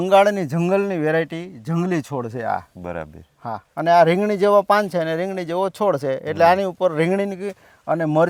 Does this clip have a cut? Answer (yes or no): no